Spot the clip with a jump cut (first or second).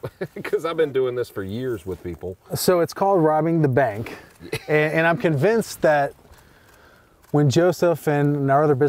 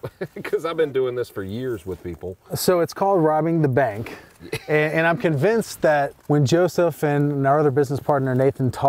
second